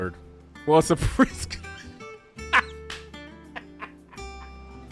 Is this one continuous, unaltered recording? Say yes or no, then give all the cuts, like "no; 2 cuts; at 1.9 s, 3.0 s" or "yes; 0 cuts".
yes; 0 cuts